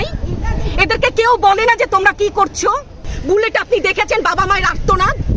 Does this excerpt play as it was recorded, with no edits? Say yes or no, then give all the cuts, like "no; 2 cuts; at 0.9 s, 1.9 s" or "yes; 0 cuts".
no; 1 cut; at 3.1 s